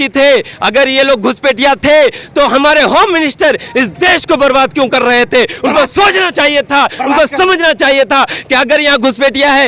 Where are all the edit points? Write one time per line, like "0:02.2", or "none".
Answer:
none